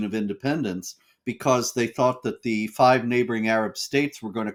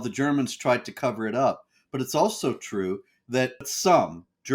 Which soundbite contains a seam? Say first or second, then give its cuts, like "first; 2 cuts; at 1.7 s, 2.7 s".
second; 1 cut; at 3.6 s